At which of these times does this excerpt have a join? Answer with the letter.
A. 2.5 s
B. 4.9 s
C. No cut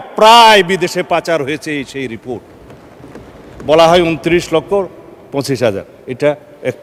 C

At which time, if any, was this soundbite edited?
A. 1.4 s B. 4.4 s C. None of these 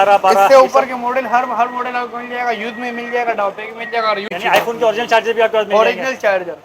B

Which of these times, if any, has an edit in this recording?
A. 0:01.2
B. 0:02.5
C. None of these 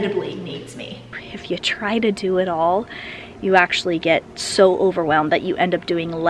A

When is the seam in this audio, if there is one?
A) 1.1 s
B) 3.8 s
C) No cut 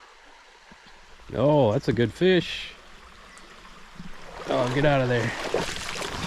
A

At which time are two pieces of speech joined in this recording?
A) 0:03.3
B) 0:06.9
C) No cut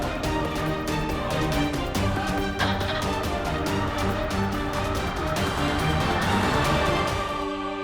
B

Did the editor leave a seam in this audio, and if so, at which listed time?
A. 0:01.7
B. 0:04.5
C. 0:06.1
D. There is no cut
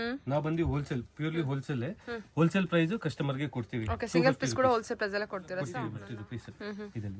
C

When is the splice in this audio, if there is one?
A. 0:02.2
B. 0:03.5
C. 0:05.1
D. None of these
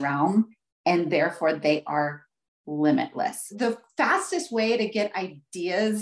B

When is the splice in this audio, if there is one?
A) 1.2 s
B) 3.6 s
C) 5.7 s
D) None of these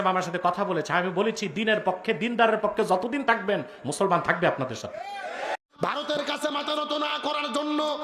C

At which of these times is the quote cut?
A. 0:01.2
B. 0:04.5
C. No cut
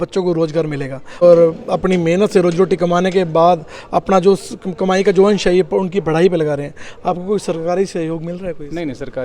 A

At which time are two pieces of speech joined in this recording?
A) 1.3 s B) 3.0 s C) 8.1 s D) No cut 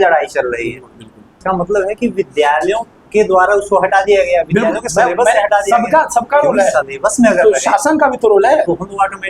A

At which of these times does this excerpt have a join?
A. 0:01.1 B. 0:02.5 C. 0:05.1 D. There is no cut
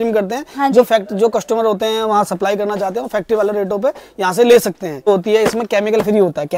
C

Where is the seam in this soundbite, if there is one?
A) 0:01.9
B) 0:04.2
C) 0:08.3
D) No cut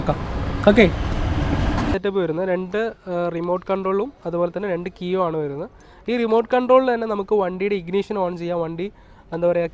A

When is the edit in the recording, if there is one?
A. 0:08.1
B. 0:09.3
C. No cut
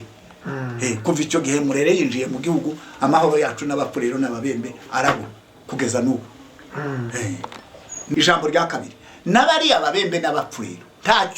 A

